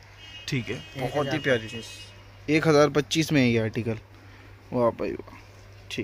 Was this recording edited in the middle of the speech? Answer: no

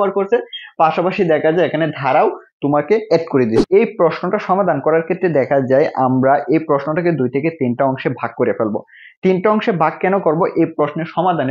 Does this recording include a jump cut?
yes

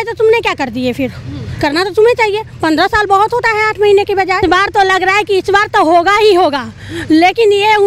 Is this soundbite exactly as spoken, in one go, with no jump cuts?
no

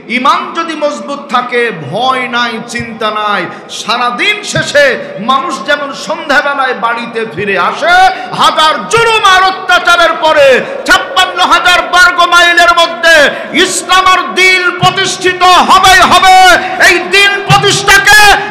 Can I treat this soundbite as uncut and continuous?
yes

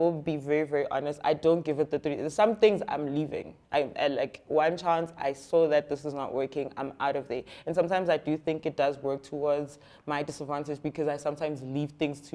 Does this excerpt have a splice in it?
no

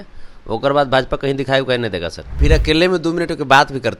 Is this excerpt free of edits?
no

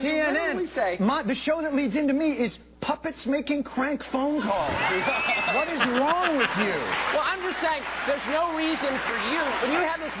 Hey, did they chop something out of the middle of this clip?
no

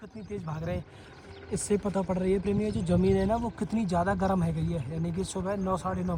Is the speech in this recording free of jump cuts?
yes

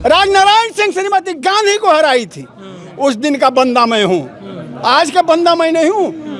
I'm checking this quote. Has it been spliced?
no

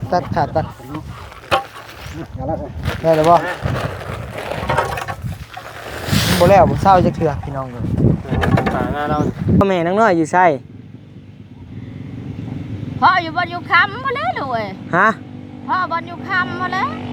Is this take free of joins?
no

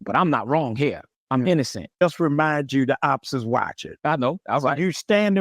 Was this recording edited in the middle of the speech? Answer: yes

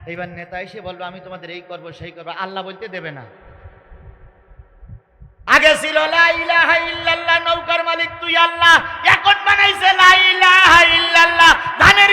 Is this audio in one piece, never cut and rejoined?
no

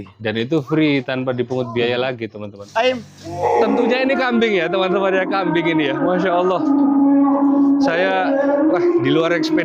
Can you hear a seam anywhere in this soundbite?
yes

